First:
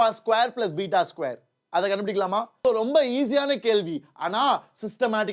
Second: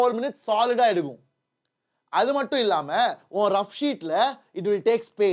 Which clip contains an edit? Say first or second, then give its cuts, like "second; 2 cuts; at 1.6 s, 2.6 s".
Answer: first; 1 cut; at 2.5 s